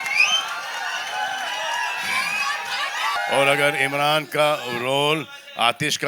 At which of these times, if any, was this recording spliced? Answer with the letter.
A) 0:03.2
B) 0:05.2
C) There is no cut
A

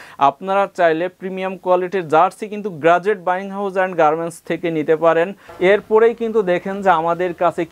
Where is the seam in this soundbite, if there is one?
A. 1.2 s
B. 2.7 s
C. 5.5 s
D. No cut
C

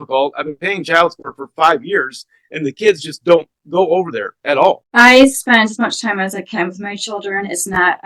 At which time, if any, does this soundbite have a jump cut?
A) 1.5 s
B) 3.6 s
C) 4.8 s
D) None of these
C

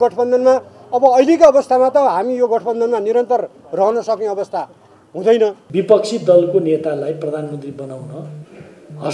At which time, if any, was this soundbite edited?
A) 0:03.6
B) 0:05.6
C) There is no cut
B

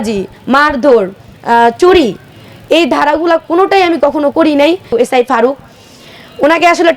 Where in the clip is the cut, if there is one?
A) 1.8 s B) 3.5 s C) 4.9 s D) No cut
C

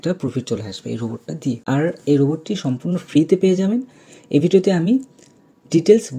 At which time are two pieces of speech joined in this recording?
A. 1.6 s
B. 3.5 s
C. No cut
A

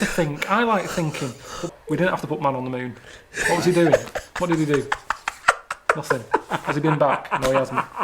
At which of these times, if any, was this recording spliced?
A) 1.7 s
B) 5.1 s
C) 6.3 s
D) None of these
A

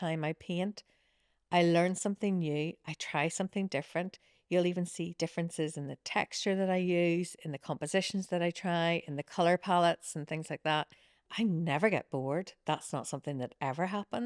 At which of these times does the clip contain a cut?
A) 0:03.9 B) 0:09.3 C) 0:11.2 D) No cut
C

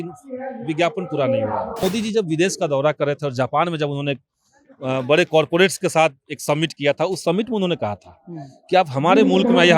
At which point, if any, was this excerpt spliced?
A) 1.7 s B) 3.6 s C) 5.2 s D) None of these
A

